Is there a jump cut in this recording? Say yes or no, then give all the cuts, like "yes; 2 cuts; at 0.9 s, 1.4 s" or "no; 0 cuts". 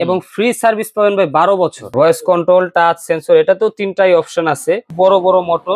yes; 2 cuts; at 1.9 s, 4.9 s